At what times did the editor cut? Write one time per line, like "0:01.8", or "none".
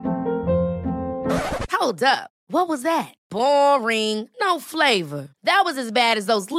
none